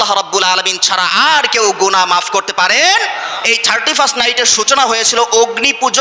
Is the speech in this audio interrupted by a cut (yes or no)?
yes